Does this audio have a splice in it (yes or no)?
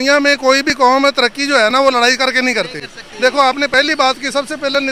no